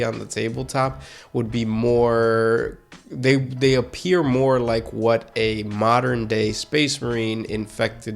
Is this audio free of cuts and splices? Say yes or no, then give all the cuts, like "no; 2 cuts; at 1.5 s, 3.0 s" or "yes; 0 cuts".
yes; 0 cuts